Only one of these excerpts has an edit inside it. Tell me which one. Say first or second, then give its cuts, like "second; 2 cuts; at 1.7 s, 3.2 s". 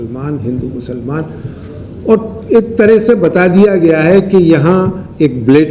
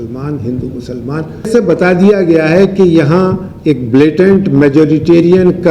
second; 1 cut; at 1.5 s